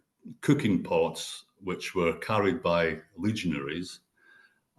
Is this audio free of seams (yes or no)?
yes